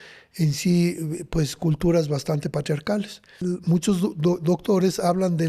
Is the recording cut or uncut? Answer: cut